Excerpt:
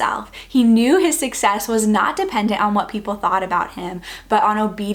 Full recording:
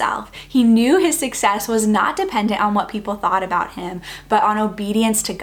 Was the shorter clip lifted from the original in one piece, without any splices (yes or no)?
yes